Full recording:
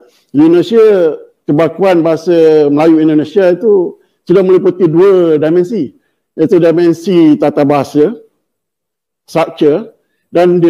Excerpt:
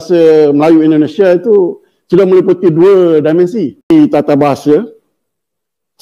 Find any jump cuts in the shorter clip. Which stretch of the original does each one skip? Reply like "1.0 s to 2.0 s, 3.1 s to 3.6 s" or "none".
6.1 s to 7.2 s